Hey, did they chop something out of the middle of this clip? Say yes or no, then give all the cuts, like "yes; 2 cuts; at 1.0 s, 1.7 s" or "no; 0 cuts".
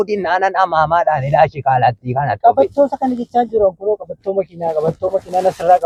no; 0 cuts